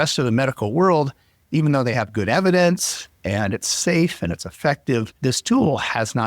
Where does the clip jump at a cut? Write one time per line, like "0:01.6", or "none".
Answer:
0:05.1